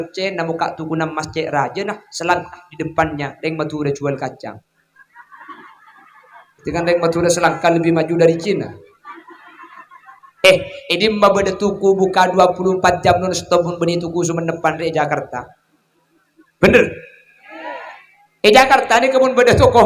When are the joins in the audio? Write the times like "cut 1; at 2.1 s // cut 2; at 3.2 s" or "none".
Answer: none